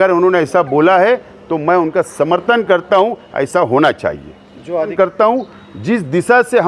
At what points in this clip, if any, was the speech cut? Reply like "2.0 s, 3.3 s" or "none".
4.9 s